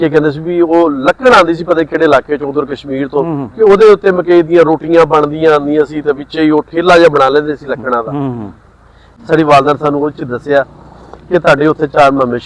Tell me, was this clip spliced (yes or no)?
yes